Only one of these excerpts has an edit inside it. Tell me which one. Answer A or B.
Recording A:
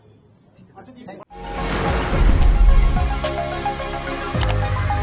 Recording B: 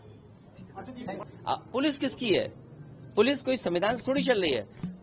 B